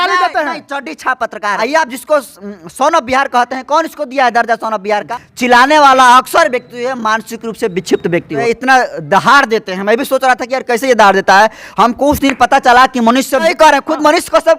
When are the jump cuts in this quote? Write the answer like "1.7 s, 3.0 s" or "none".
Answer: 1.6 s, 5.1 s, 8.4 s, 13.4 s